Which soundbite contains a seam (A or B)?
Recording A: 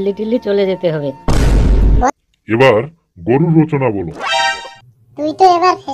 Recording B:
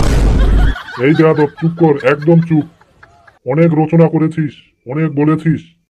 A